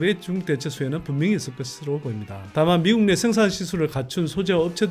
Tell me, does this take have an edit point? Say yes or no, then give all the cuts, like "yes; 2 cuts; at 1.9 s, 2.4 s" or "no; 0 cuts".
no; 0 cuts